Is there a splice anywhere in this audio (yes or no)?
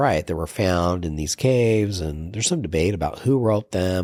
no